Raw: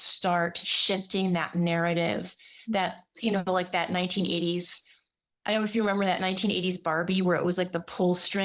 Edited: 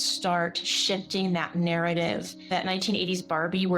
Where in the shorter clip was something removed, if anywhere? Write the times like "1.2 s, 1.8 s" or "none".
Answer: 2.5 s